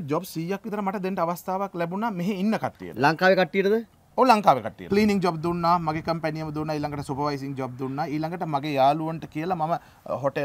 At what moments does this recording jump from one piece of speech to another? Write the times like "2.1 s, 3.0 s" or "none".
4.8 s